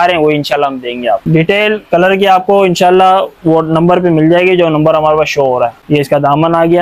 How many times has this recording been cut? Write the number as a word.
two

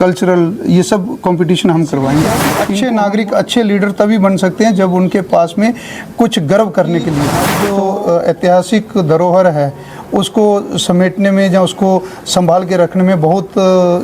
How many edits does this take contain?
two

